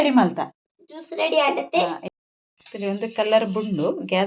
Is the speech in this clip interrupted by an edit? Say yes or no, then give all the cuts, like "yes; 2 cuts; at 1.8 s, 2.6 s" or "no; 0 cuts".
yes; 1 cut; at 2.1 s